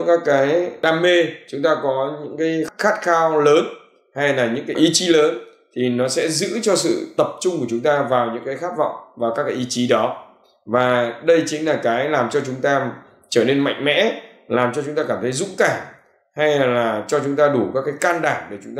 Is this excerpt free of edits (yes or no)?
no